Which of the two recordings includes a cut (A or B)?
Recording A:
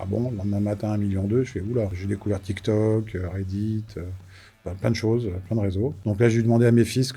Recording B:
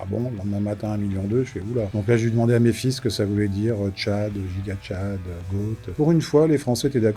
B